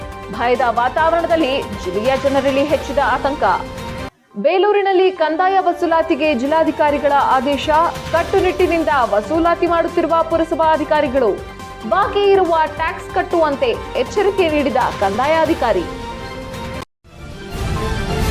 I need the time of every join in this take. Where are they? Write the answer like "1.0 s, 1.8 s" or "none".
16.9 s